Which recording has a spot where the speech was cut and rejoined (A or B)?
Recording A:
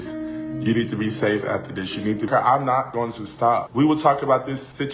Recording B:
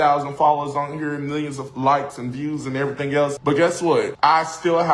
A